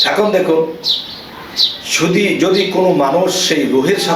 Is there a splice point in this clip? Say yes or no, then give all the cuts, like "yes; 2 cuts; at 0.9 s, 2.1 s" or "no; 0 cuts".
no; 0 cuts